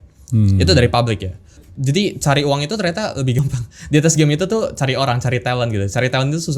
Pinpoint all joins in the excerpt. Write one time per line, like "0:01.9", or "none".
0:01.6